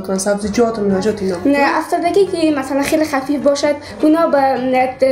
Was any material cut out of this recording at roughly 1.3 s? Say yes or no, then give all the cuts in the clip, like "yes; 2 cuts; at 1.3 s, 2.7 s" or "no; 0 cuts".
yes; 1 cut; at 1.3 s